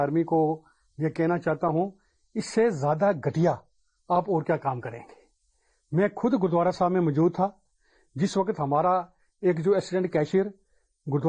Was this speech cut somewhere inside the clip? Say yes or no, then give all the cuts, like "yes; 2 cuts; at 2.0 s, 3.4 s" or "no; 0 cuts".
no; 0 cuts